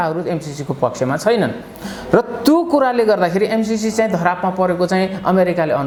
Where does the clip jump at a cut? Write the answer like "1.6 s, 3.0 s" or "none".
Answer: none